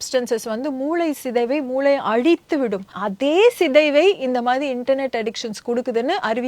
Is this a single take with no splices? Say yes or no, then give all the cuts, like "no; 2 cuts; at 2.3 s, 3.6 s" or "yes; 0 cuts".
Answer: no; 1 cut; at 3.0 s